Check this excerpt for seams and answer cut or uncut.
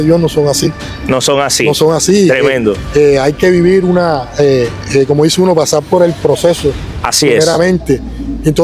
uncut